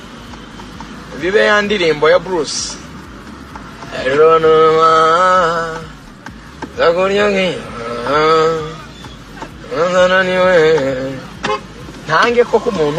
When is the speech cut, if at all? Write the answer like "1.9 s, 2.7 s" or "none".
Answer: none